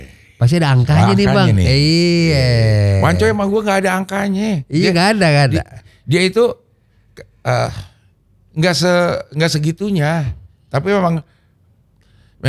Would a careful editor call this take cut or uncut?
uncut